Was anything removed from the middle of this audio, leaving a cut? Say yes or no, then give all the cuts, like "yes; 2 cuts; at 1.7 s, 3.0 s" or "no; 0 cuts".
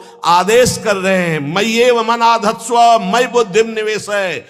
no; 0 cuts